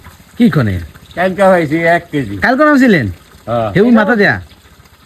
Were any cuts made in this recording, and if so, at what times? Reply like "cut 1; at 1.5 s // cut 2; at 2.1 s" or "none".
none